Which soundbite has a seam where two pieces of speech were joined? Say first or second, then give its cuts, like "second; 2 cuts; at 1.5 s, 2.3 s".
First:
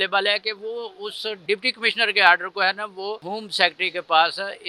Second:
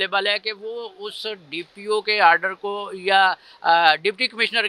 first; 2 cuts; at 1.4 s, 3.3 s